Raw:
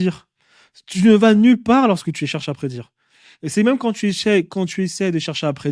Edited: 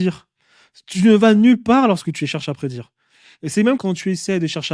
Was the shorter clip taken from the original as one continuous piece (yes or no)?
no